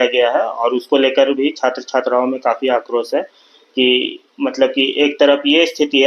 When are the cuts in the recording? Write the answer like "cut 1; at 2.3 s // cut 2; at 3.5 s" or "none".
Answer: none